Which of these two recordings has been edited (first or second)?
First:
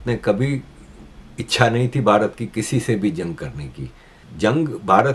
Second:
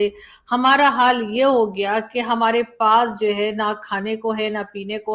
first